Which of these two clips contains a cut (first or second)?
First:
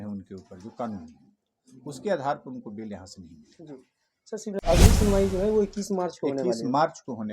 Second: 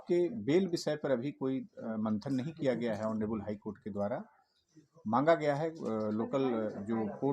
first